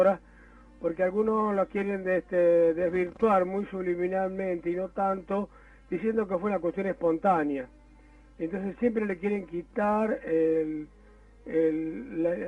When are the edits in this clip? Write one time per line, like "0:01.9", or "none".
0:07.9